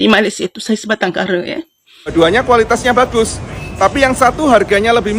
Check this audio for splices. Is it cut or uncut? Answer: cut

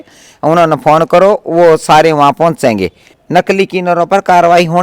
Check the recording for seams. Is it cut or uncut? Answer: cut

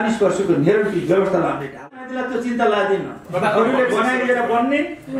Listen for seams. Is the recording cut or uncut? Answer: cut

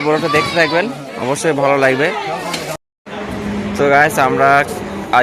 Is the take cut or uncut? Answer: cut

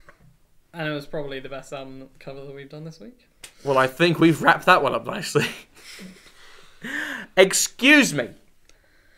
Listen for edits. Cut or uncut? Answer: cut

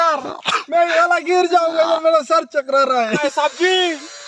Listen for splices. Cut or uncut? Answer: cut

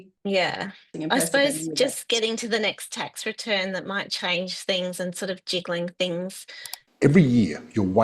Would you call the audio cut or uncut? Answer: cut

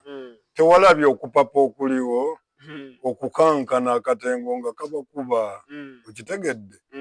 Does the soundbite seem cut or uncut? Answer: uncut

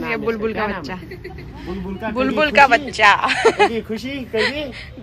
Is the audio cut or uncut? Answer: uncut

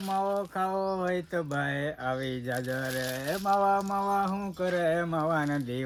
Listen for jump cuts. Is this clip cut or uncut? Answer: uncut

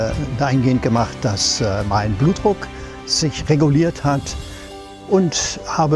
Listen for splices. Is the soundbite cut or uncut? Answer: cut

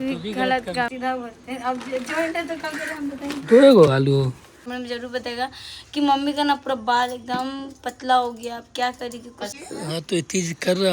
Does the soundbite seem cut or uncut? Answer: cut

